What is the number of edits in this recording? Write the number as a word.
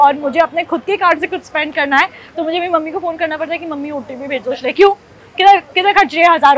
zero